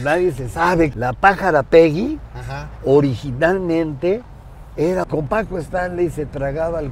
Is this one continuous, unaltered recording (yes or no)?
no